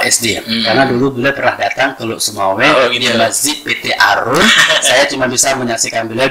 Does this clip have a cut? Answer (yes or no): no